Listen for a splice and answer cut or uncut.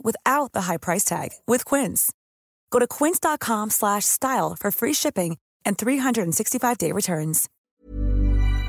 cut